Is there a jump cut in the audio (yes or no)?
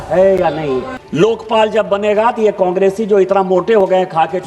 yes